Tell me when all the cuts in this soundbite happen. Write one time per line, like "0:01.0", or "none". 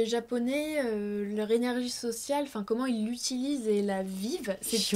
none

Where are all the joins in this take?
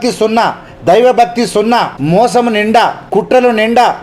0:01.9
0:03.0

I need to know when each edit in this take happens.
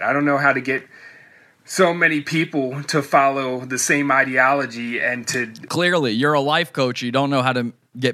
none

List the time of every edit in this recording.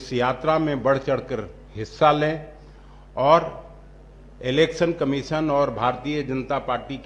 none

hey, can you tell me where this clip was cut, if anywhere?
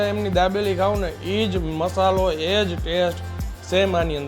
none

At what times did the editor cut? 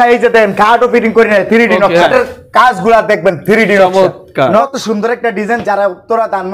0:02.1
0:04.7

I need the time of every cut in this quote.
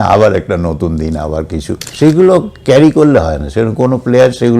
0:01.8

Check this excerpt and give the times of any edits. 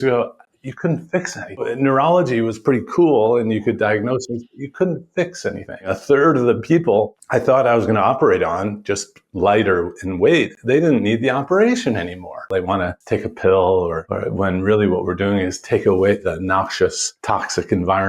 0:01.6
0:06.0
0:07.2
0:12.8
0:14.1
0:16.3
0:17.1

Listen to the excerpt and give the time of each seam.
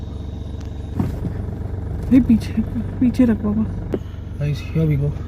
0:00.9
0:03.9

